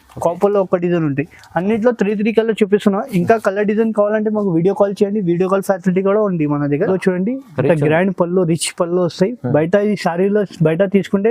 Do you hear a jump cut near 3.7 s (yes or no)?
no